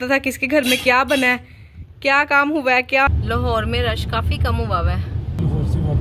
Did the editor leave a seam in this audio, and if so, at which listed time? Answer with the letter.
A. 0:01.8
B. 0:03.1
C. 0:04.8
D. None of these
B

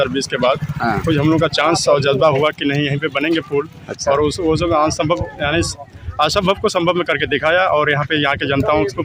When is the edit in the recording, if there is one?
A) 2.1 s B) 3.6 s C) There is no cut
C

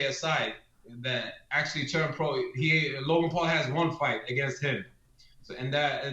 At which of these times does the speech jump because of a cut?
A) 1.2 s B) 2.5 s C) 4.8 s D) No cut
D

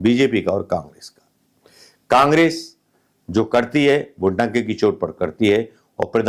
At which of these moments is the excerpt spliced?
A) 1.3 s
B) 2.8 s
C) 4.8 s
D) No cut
D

